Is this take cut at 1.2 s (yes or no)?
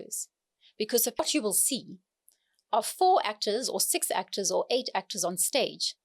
yes